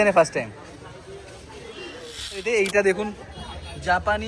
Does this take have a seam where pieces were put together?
yes; 1 cut; at 2.5 s

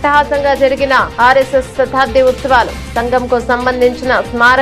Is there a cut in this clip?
no; 0 cuts

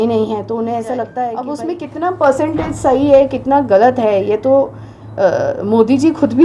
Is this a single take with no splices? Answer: no; 1 cut; at 1.5 s

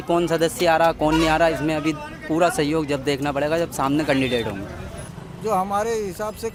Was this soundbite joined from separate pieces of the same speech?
no; 0 cuts

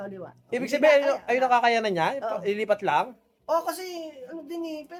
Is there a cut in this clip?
no; 0 cuts

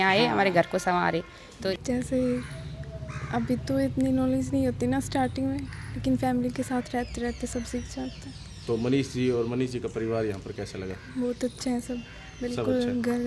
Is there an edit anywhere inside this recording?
yes; 1 cut; at 1.7 s

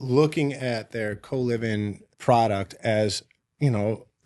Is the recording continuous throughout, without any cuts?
no; 1 cut; at 2.1 s

